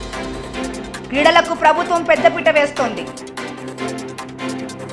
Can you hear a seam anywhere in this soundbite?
yes; 2 cuts; at 1.1 s, 3.5 s

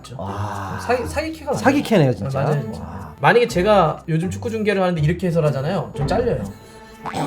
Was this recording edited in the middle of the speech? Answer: yes; 1 cut; at 3.1 s

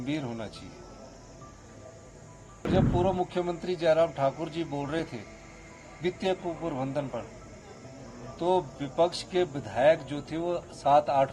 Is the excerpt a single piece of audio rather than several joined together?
no; 1 cut; at 2.6 s

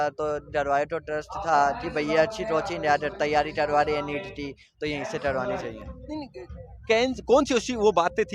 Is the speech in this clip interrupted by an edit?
no; 0 cuts

